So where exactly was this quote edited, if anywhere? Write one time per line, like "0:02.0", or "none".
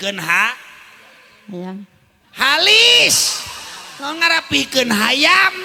none